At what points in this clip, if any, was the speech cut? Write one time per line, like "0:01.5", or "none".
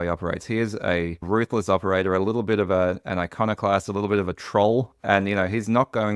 none